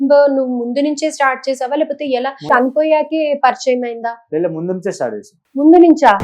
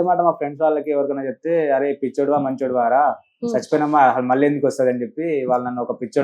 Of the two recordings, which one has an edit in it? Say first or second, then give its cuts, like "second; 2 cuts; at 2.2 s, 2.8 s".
first; 2 cuts; at 2.5 s, 5.3 s